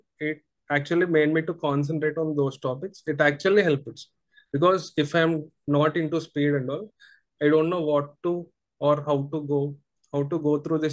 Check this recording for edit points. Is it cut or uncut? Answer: uncut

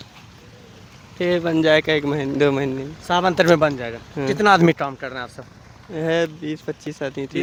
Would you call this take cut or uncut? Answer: uncut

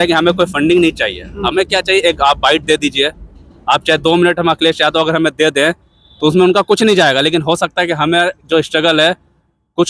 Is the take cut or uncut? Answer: uncut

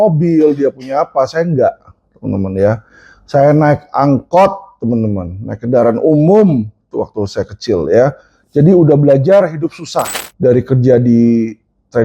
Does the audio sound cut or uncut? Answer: cut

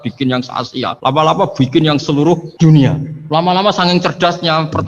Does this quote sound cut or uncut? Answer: cut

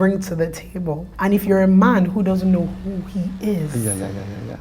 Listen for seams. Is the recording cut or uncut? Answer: cut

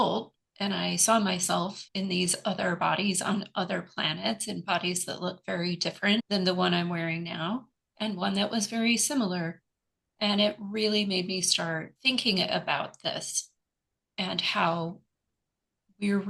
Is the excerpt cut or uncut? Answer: cut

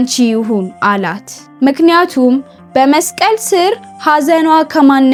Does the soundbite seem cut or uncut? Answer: uncut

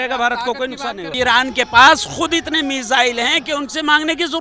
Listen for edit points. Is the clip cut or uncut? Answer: cut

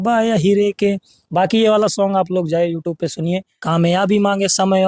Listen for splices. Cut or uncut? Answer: cut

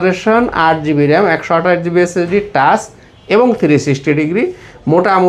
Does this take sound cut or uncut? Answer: uncut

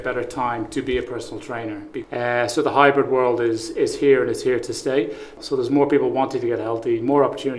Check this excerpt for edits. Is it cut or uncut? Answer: cut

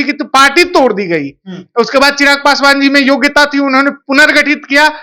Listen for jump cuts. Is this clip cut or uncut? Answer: uncut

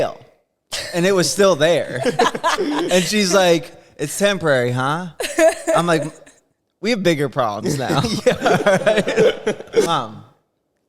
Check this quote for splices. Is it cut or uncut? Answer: cut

